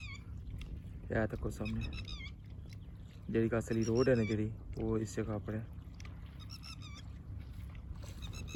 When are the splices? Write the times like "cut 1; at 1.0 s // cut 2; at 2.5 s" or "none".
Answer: none